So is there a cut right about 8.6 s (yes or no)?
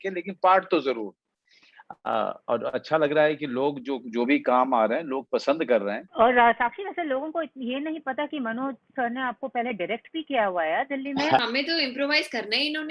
no